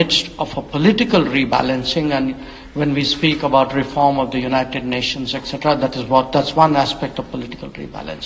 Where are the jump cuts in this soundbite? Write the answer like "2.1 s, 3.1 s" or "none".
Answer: none